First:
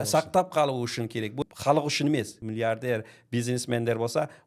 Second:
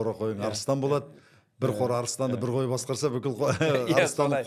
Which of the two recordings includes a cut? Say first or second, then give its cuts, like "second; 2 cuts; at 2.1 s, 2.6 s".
first; 2 cuts; at 1.4 s, 2.4 s